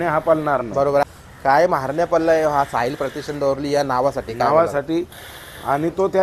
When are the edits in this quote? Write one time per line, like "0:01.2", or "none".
0:01.0